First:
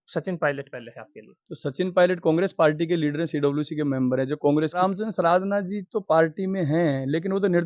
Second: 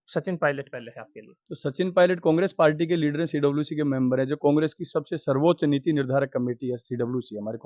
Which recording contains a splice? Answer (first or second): first